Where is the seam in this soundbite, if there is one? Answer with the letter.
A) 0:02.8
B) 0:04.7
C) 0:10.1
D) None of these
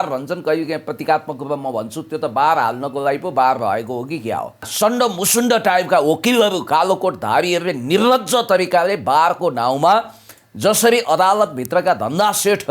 B